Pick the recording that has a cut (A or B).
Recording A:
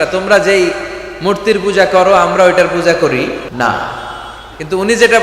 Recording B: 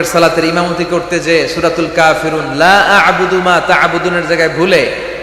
A